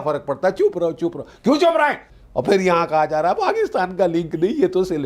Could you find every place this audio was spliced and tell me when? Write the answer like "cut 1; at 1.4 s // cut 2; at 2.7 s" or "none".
cut 1; at 2.1 s